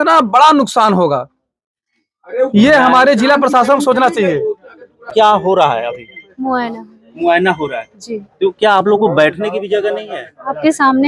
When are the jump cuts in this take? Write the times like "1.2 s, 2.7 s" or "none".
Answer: 5.1 s